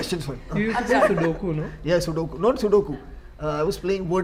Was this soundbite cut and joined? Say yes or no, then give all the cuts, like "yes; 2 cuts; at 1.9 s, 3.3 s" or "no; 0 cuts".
no; 0 cuts